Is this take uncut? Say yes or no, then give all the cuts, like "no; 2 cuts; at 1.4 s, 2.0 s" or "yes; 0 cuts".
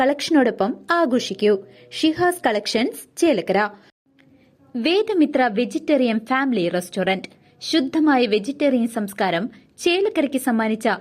no; 1 cut; at 3.9 s